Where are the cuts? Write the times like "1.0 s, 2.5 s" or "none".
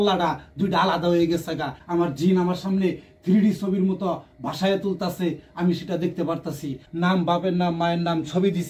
1.8 s, 6.8 s